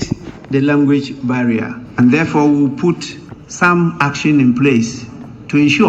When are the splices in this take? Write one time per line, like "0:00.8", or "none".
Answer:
0:01.8